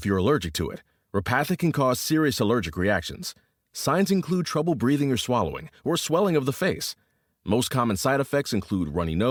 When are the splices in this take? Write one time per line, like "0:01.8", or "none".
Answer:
none